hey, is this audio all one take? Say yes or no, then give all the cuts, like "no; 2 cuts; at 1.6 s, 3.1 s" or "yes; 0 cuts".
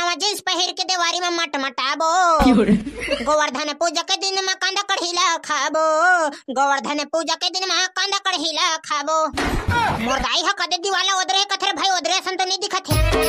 yes; 0 cuts